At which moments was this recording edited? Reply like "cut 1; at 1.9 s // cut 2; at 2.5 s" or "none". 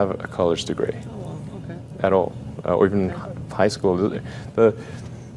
none